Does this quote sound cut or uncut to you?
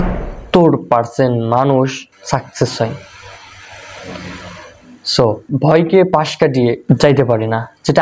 cut